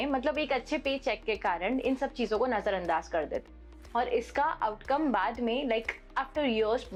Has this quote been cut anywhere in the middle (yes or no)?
no